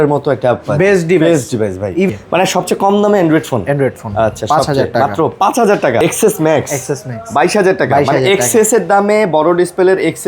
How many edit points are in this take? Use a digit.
2